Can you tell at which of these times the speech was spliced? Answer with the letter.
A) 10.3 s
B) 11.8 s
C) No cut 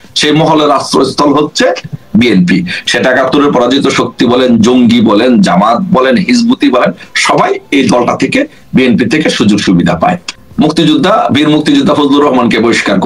A